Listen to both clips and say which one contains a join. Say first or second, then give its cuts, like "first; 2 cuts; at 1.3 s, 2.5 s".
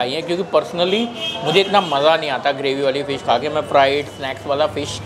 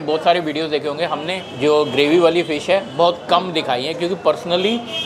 second; 1 cut; at 1.4 s